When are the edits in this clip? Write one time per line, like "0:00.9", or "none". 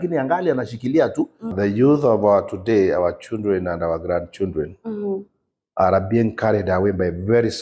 0:01.5